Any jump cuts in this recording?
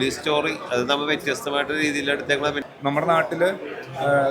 yes; 1 cut; at 2.6 s

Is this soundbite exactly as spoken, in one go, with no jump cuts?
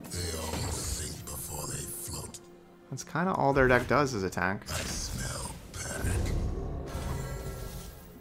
yes; 0 cuts

